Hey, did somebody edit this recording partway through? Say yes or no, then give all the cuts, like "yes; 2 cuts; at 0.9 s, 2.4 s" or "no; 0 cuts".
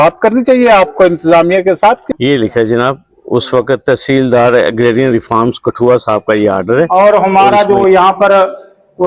yes; 2 cuts; at 2.0 s, 6.9 s